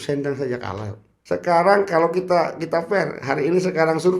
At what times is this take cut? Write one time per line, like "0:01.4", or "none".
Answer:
0:01.3